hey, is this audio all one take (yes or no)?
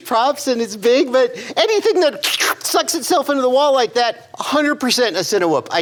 yes